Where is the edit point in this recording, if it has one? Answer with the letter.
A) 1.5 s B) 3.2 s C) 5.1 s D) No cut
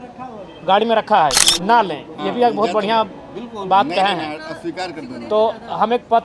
A